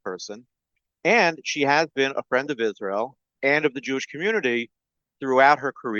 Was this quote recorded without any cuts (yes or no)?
no